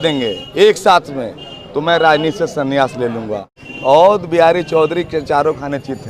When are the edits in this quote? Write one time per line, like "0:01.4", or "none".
0:03.6